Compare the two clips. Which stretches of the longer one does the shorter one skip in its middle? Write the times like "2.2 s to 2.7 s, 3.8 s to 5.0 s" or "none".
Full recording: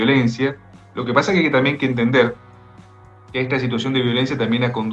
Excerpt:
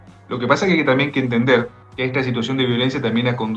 2.5 s to 3.2 s